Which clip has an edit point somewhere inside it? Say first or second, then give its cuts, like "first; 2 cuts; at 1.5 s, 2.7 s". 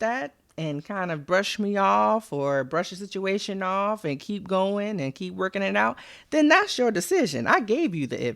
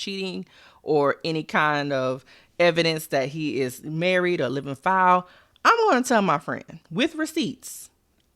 second; 1 cut; at 6.7 s